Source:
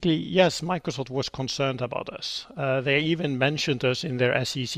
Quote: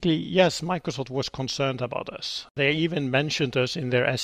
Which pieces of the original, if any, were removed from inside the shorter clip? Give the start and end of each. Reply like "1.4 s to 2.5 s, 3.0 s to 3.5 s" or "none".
2.5 s to 2.8 s